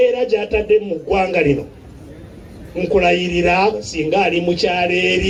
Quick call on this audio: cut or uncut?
uncut